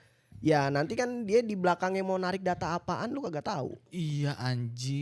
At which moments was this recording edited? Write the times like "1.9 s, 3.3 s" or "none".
none